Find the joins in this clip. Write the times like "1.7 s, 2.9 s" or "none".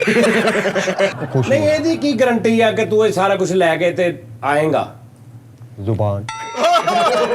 1.1 s

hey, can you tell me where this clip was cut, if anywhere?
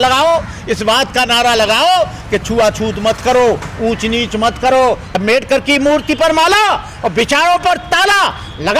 5.1 s

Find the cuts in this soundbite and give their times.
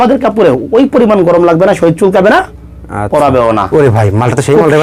3.6 s

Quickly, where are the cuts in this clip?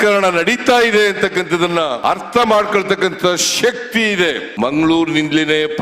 4.5 s

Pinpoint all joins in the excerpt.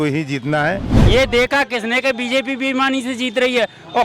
0.9 s

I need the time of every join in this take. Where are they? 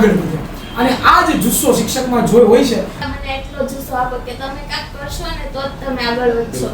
3.0 s

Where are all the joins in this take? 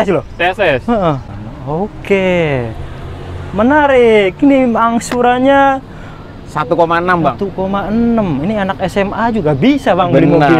1.2 s

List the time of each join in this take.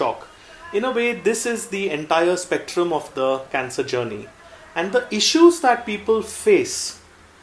none

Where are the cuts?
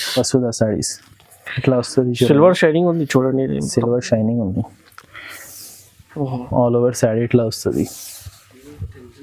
none

